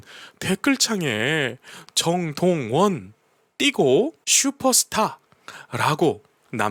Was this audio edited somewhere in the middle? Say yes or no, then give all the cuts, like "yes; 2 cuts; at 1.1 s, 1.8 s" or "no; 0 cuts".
no; 0 cuts